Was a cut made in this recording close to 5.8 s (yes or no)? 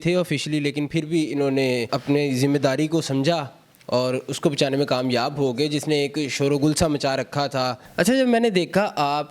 no